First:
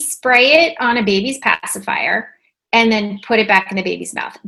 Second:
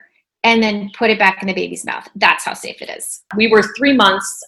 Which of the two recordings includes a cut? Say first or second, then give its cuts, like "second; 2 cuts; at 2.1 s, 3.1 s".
second; 1 cut; at 3.3 s